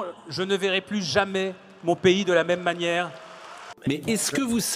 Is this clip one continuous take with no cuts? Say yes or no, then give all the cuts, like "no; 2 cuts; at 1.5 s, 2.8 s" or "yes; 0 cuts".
no; 1 cut; at 3.7 s